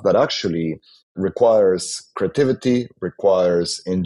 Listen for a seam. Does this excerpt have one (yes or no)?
yes